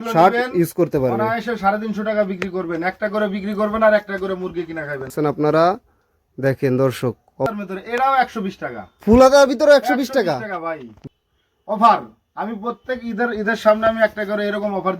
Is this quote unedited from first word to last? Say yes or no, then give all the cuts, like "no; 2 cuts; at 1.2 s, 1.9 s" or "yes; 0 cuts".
no; 3 cuts; at 5.1 s, 7.5 s, 10.9 s